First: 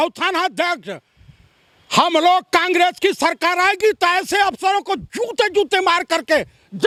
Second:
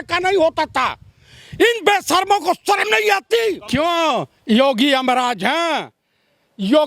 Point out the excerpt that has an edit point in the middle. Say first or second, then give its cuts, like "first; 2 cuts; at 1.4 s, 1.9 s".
second; 1 cut; at 3.6 s